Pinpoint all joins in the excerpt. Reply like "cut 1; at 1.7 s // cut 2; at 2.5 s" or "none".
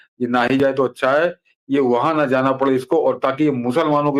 none